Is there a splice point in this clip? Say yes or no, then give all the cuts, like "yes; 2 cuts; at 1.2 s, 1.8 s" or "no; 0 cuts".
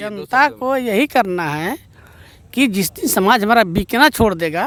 no; 0 cuts